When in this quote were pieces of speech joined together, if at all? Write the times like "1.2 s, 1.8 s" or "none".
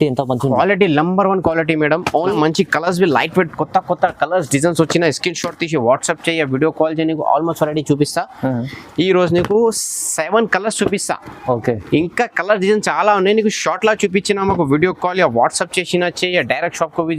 2.2 s